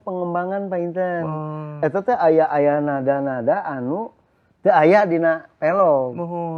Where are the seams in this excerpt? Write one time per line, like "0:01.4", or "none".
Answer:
0:01.8